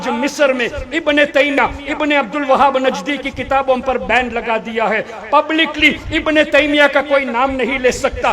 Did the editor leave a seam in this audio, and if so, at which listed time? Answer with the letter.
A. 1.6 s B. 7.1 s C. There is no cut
A